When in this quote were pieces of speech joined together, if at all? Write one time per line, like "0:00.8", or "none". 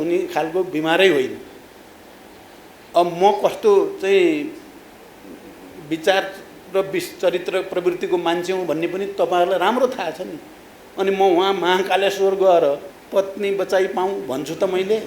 0:12.9